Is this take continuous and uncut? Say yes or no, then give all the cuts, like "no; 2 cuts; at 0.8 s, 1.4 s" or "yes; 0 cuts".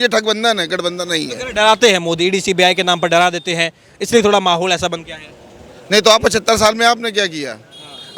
yes; 0 cuts